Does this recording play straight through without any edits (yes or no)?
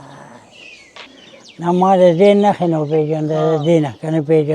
no